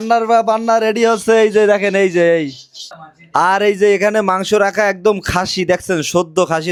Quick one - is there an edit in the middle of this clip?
no; 0 cuts

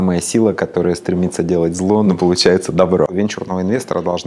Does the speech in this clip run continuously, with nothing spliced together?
no; 2 cuts; at 2.1 s, 3.1 s

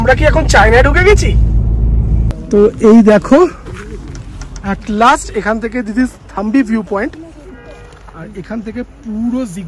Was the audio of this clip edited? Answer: yes; 1 cut; at 2.3 s

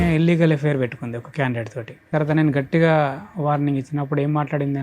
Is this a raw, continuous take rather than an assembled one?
no; 1 cut; at 2.1 s

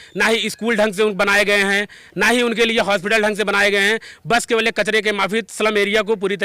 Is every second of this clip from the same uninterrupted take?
yes; 0 cuts

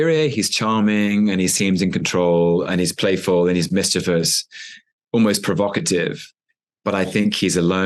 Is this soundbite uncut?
yes; 0 cuts

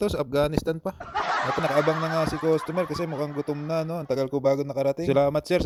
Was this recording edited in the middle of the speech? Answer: no; 0 cuts

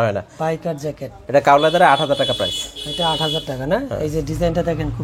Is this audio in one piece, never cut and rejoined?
yes; 0 cuts

